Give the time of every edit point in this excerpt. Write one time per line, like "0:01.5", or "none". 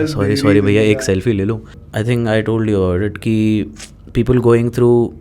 0:01.8

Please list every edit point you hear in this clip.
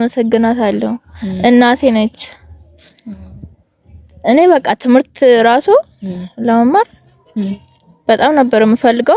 none

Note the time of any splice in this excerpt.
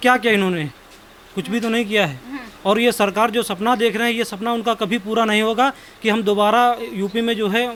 none

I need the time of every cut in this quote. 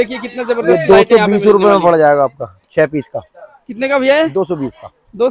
none

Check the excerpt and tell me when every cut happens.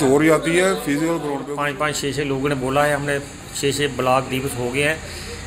0:01.4

